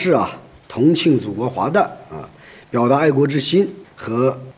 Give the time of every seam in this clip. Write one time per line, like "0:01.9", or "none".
none